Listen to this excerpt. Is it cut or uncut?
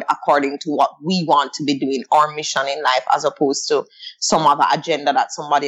uncut